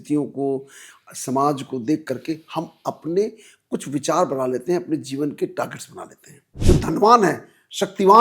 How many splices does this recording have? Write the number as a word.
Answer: one